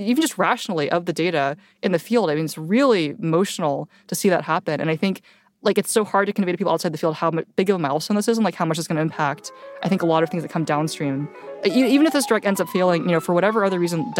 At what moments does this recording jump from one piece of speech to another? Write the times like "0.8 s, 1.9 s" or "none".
11.6 s